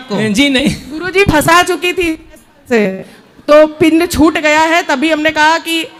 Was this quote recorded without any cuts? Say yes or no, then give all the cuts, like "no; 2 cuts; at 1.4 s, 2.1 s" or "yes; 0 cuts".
yes; 0 cuts